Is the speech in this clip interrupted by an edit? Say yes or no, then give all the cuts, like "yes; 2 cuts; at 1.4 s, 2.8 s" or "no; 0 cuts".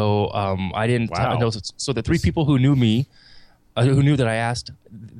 no; 0 cuts